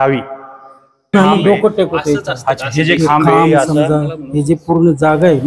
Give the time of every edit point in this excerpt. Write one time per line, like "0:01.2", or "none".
0:01.1